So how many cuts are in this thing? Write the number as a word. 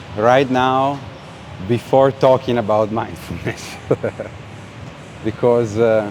zero